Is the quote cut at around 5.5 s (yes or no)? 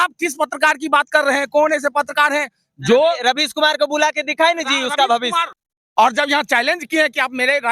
yes